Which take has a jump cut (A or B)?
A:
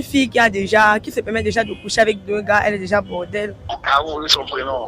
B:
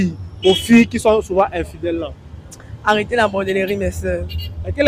A